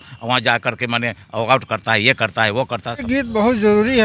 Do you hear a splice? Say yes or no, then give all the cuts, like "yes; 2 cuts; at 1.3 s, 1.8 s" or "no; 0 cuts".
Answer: yes; 1 cut; at 3.0 s